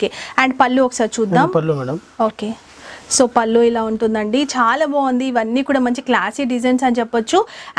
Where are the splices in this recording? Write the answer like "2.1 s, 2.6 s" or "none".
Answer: none